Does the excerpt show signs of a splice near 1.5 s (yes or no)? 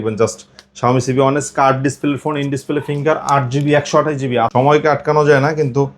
no